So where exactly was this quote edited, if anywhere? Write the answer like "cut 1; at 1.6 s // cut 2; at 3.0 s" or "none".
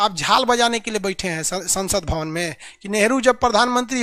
none